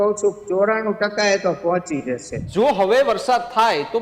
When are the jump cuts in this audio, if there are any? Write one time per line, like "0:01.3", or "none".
0:02.4

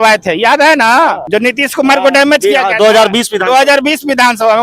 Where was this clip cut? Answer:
0:01.2

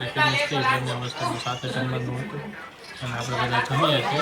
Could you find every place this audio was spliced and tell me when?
none

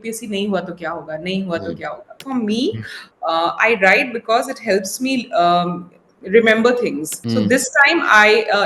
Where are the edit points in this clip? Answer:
0:02.1
0:07.1

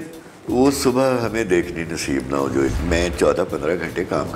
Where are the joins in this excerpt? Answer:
0:02.8

